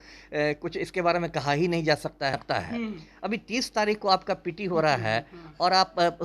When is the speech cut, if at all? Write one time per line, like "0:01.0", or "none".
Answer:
0:02.3

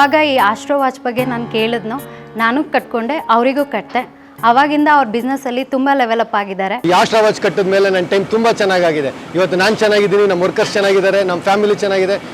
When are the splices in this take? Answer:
0:06.8

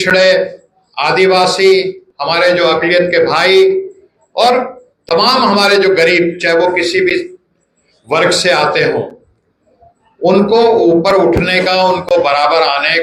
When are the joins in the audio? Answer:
none

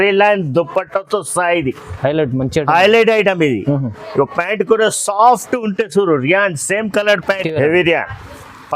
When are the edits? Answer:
0:07.4

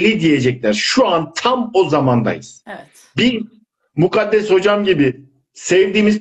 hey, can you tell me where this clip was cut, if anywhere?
none

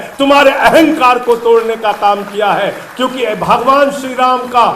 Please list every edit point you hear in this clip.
none

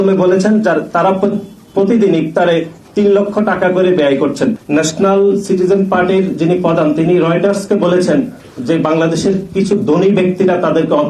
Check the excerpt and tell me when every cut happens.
0:04.6

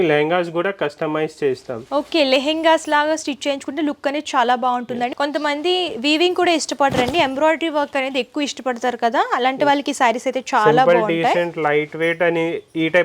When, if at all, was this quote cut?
0:05.1

